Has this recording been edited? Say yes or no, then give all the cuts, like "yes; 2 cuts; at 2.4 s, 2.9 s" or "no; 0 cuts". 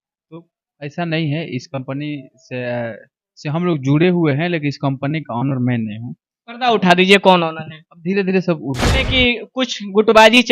yes; 1 cut; at 9.1 s